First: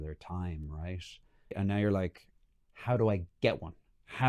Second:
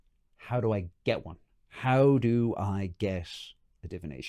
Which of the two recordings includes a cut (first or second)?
first